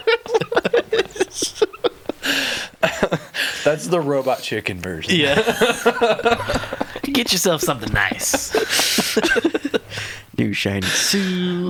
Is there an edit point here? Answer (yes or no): no